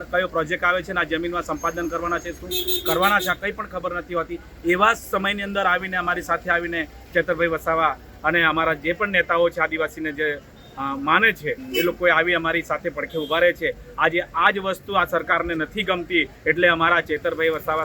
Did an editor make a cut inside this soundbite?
no; 0 cuts

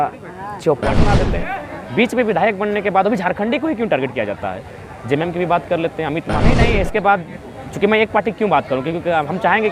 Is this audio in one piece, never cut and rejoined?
no; 2 cuts; at 1.3 s, 6.6 s

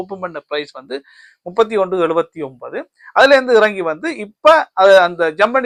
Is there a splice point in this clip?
no; 0 cuts

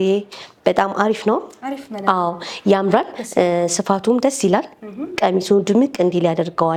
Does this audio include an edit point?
no; 0 cuts

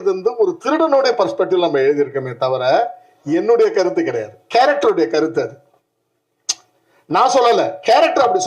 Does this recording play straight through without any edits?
yes; 0 cuts

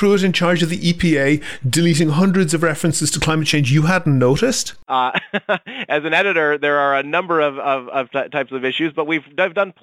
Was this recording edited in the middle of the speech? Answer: yes; 1 cut; at 4.7 s

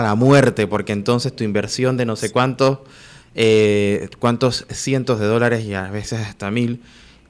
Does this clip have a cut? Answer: no; 0 cuts

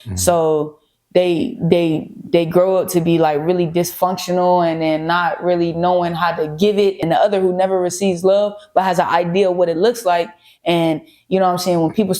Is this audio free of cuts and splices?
no; 1 cut; at 7.0 s

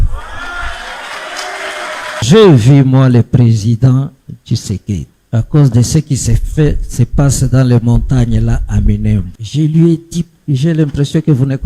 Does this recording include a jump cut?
yes; 4 cuts; at 2.2 s, 5.1 s, 9.4 s, 10.3 s

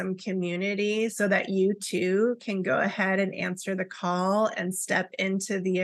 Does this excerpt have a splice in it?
no; 0 cuts

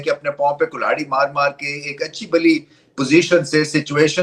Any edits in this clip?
no; 0 cuts

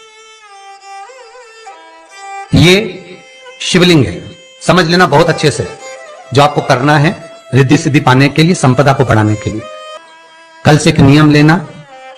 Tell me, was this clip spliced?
yes; 1 cut; at 9.8 s

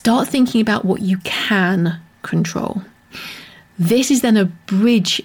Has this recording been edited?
no; 0 cuts

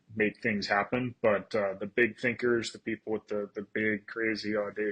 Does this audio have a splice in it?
no; 0 cuts

